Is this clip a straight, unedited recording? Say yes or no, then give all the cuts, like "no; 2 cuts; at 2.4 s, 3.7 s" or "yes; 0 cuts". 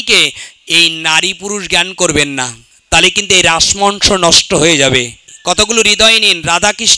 no; 1 cut; at 5.3 s